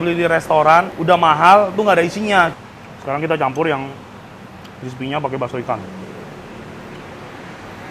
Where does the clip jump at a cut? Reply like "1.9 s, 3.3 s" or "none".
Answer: 0.9 s, 2.5 s

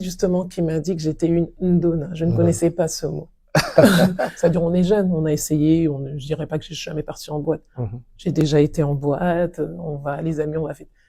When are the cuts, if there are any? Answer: 4.2 s

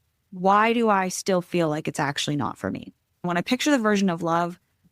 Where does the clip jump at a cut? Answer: 3.2 s

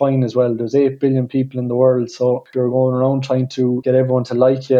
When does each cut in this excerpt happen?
2.5 s, 3.8 s

